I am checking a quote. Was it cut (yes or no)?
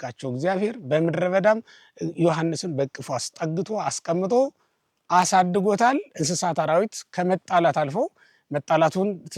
no